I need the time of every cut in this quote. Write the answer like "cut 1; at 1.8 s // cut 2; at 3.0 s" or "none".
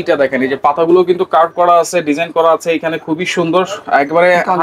none